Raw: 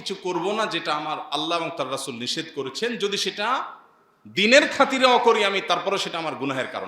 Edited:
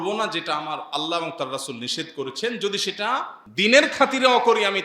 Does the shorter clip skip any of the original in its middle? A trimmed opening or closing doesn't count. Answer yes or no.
yes